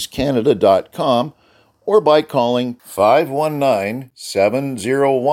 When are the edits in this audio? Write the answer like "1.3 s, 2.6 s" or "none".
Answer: none